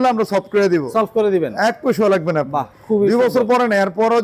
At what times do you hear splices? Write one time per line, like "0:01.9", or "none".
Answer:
none